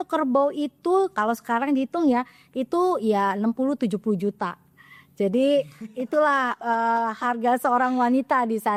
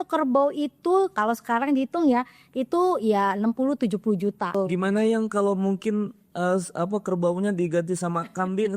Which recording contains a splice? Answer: second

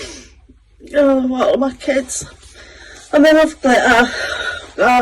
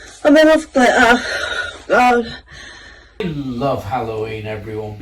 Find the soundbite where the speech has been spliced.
second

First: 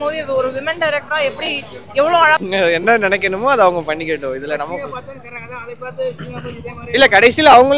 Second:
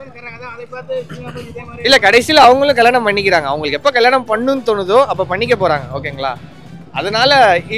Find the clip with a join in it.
first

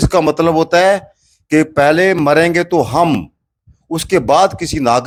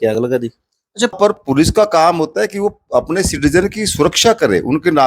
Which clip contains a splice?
second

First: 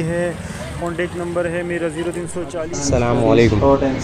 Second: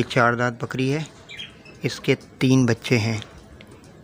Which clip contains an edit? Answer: first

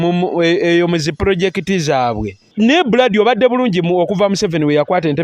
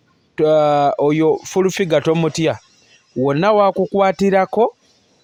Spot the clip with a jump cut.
first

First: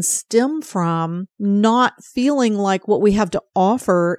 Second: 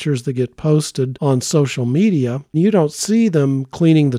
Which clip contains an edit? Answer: second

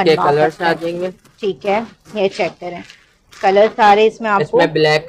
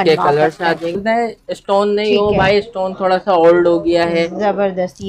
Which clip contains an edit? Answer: second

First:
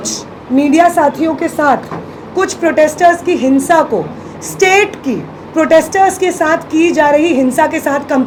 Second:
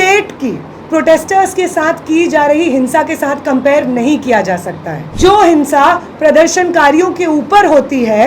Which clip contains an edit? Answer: second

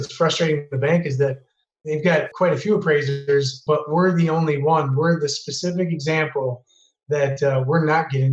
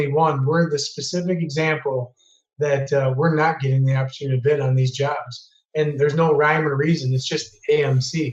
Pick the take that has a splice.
first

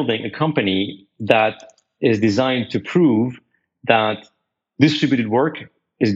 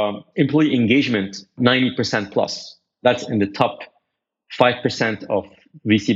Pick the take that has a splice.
second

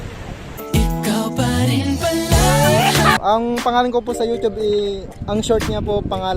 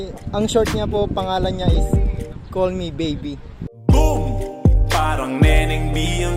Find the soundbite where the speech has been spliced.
first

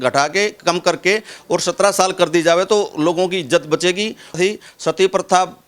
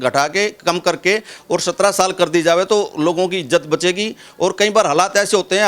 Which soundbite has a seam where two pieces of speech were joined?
first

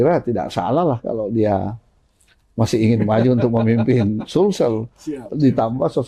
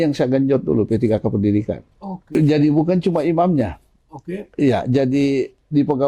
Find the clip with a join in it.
second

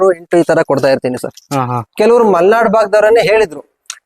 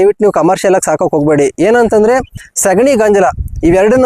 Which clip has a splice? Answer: first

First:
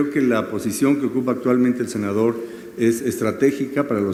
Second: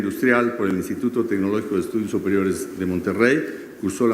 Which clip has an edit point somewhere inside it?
second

